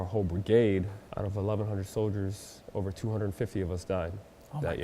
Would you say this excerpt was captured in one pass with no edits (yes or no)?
no